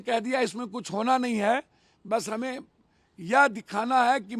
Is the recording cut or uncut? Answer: uncut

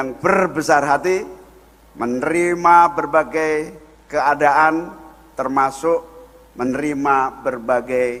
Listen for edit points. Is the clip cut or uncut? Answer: uncut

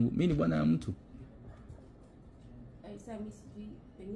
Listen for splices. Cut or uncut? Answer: uncut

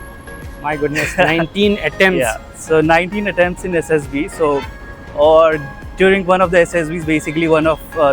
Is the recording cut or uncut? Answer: uncut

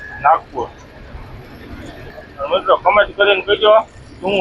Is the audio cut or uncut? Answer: cut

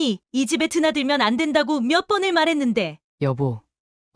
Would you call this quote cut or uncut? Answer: cut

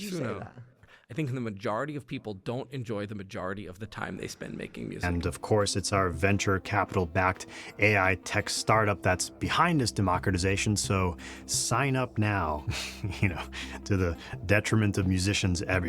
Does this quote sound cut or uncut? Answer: cut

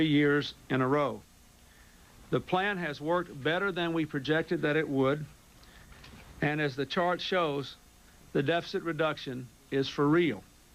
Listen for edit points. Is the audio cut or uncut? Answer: uncut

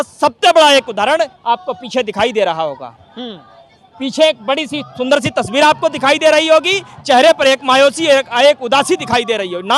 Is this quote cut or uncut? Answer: uncut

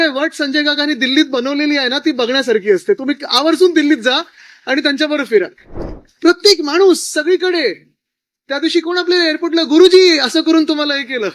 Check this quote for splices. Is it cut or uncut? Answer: uncut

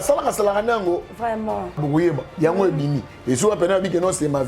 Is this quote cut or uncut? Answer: cut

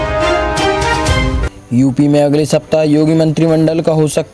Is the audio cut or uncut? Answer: cut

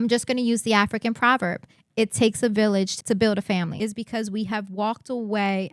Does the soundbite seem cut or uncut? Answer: cut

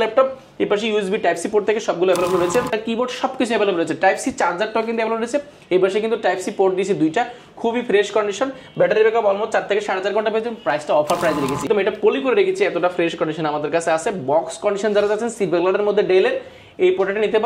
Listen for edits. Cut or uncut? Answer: cut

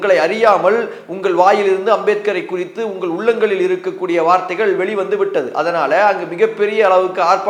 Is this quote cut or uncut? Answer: uncut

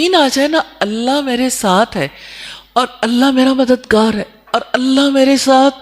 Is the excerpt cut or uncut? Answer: uncut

